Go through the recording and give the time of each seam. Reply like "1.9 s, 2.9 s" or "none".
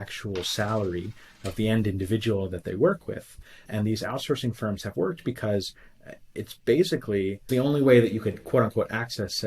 3.7 s, 7.5 s

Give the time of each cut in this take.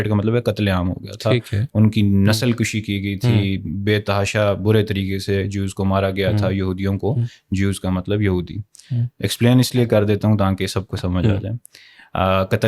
none

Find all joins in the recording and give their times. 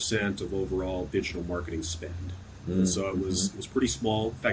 none

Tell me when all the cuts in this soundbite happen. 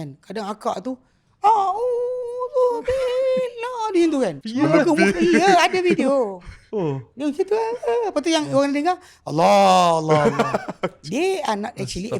4.4 s

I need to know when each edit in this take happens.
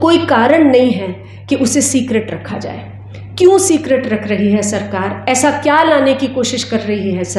none

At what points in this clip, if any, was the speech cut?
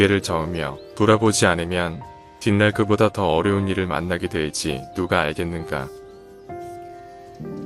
6.1 s

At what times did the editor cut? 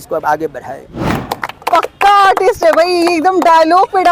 1.1 s

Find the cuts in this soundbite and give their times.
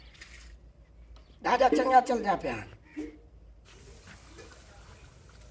3.7 s

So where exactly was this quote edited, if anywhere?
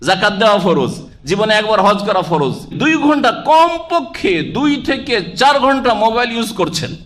2.7 s

